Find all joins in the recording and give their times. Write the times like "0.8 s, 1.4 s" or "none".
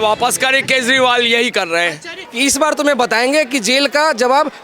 2.2 s